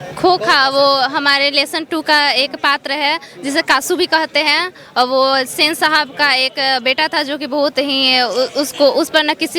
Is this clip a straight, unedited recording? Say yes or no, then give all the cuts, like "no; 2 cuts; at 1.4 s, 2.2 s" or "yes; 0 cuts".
yes; 0 cuts